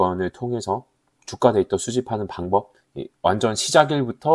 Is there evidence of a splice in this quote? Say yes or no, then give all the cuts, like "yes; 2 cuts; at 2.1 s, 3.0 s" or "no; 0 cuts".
no; 0 cuts